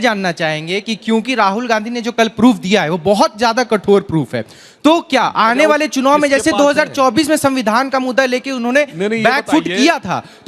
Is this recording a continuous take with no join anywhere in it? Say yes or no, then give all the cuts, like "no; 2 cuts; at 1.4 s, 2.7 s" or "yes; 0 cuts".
yes; 0 cuts